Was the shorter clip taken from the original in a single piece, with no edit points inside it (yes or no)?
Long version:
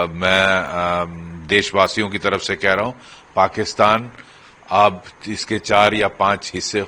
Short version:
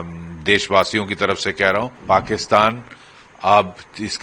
no